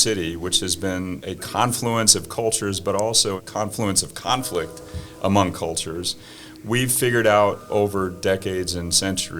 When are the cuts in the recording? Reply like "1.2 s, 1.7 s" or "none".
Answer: 1.2 s, 3.4 s